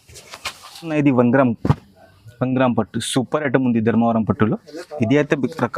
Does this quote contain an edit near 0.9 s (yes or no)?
yes